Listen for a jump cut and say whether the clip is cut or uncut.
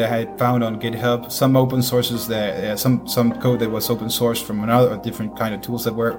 uncut